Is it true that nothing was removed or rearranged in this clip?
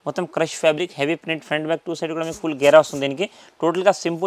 yes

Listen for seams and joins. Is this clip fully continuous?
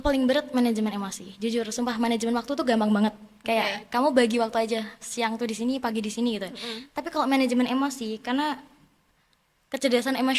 yes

